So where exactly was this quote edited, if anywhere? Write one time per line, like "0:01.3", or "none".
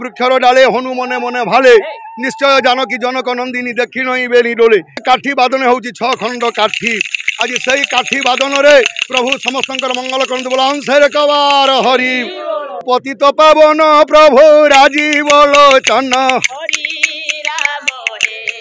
0:05.0
0:12.8